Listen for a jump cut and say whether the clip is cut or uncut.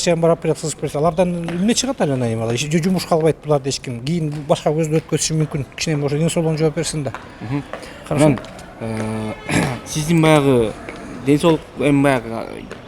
uncut